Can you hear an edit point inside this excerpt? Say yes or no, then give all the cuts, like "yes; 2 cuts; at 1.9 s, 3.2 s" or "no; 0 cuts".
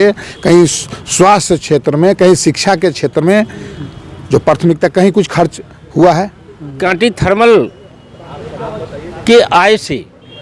yes; 1 cut; at 6.8 s